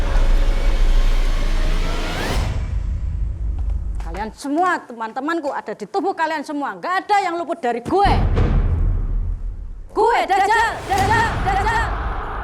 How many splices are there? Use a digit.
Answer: 0